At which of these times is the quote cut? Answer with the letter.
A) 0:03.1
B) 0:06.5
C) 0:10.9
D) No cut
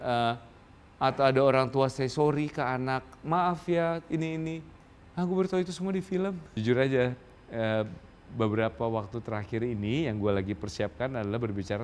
B